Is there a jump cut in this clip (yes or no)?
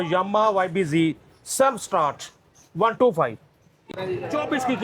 yes